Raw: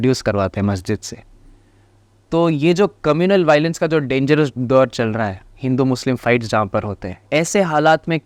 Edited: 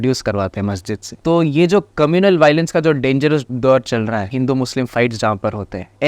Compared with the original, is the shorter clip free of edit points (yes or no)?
no